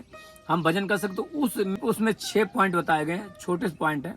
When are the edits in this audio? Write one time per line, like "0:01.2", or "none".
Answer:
0:01.8